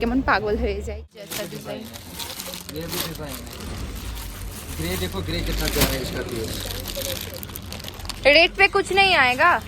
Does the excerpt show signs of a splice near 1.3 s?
yes; 1 cut; at 1.3 s

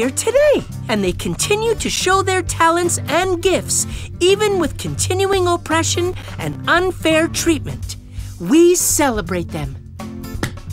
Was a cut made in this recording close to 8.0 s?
no; 1 cut; at 9.8 s

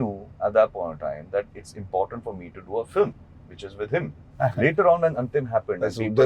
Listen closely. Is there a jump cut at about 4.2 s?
yes; 1 cut; at 4.2 s

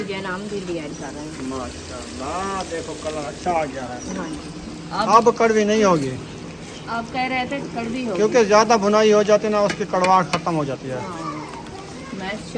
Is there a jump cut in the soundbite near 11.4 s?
no; 0 cuts

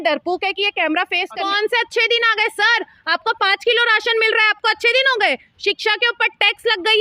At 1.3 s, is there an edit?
yes; 1 cut; at 1.3 s

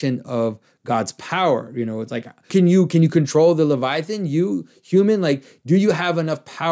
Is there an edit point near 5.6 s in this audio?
no; 1 cut; at 2.5 s

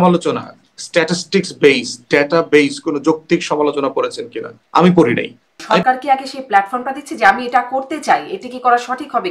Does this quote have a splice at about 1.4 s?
no; 1 cut; at 5.6 s

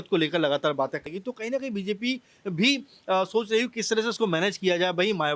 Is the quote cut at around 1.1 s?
yes; 1 cut; at 1.1 s

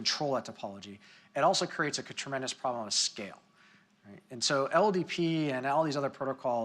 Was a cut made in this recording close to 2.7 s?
yes; 1 cut; at 2.7 s

